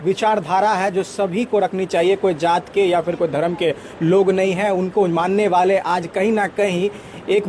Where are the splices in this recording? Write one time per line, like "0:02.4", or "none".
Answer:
none

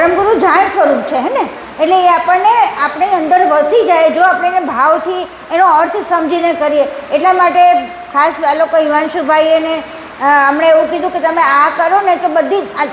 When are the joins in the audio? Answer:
none

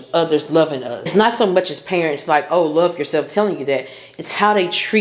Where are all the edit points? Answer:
0:01.1

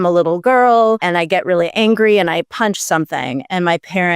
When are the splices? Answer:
0:01.0

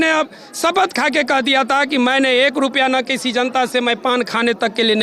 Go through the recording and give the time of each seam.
none

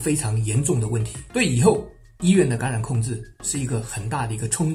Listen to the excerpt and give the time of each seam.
0:01.2

